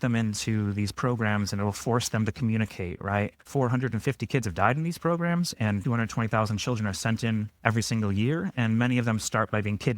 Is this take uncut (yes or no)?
yes